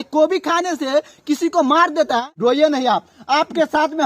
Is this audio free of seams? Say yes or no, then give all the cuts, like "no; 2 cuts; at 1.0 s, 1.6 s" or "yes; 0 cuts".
no; 1 cut; at 2.4 s